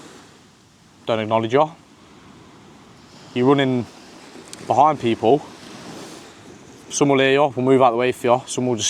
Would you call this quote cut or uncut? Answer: uncut